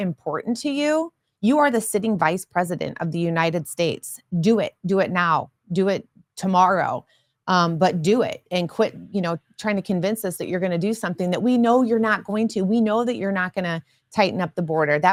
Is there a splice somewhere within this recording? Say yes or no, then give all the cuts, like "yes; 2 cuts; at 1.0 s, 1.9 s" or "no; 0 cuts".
no; 0 cuts